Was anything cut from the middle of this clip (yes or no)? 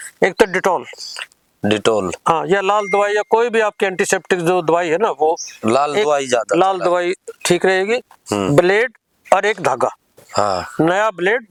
no